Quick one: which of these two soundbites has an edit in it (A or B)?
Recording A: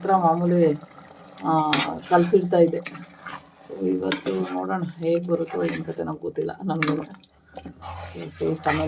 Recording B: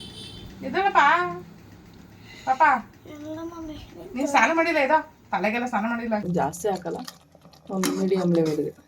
B